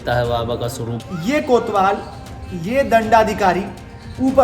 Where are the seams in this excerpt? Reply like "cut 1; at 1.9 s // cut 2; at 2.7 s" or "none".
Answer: cut 1; at 1.0 s